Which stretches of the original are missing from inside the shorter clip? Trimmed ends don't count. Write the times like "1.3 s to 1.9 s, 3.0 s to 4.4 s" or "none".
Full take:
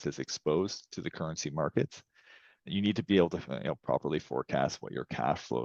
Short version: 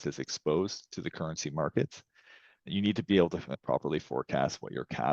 3.6 s to 3.8 s